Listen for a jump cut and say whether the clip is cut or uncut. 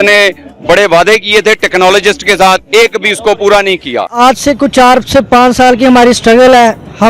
cut